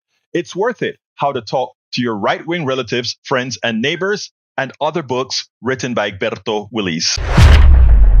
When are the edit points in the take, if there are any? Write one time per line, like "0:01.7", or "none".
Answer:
0:07.1

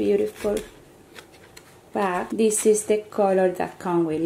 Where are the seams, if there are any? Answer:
0:02.3

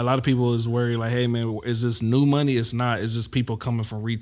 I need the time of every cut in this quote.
none

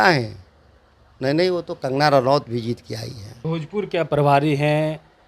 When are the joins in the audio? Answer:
0:03.4

